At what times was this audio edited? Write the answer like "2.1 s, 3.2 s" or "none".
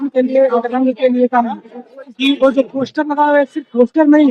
2.0 s